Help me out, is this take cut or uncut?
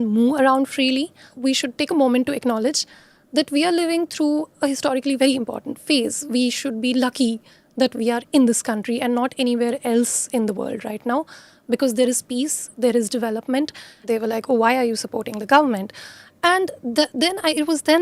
cut